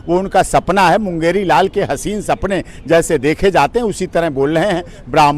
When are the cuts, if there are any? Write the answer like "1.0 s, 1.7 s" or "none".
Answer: none

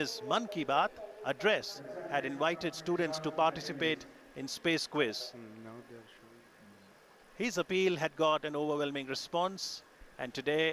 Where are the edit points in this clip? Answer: none

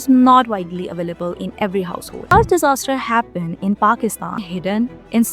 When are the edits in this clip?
2.2 s, 4.5 s

